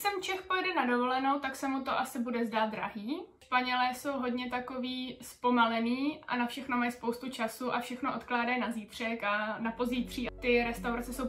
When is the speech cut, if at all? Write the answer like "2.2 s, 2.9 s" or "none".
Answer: 3.4 s, 10.3 s